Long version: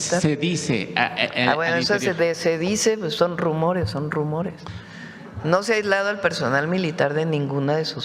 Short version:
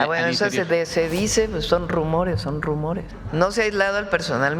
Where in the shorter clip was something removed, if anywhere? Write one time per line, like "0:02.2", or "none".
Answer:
0:03.1